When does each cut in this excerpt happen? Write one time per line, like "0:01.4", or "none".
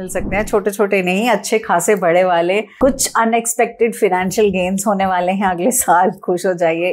0:02.7